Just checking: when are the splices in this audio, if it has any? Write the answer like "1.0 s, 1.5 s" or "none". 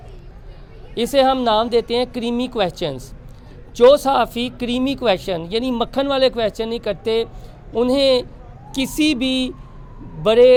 none